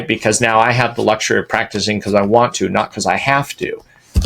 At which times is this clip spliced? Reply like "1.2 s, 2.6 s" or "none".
none